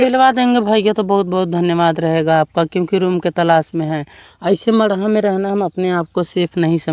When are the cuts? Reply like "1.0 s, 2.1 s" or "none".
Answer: none